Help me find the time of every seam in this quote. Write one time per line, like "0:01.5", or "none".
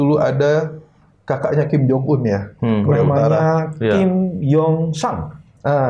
none